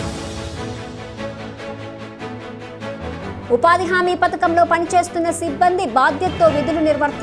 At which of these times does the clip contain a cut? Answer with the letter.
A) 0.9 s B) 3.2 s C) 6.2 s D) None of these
B